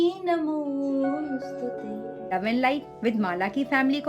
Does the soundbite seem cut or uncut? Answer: cut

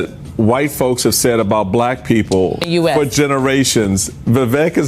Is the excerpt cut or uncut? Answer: cut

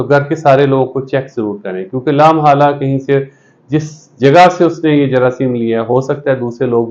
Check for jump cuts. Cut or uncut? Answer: uncut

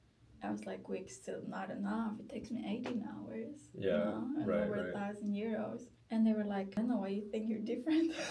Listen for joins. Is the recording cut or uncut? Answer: cut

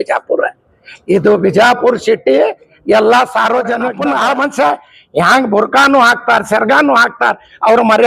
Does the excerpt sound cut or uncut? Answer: cut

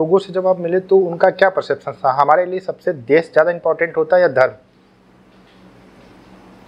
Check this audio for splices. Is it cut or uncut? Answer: uncut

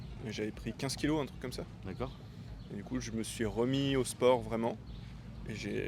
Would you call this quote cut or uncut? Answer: uncut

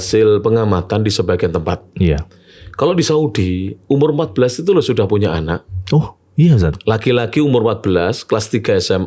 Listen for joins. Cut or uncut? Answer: uncut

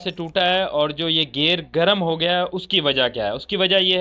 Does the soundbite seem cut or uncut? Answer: uncut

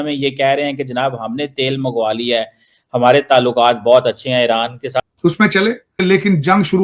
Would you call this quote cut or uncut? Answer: cut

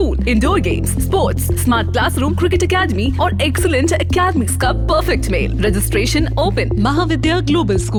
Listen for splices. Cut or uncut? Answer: uncut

